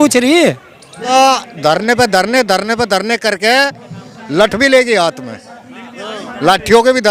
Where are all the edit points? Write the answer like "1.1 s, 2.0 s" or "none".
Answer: 1.1 s